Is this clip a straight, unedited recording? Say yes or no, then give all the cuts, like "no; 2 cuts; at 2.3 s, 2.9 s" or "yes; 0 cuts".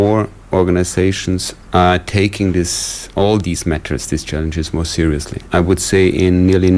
no; 2 cuts; at 1.5 s, 5.4 s